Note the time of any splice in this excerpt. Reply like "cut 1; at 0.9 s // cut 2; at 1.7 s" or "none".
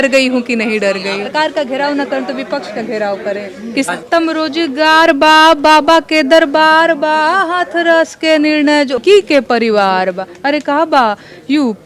cut 1; at 1.3 s // cut 2; at 3.9 s // cut 3; at 9.0 s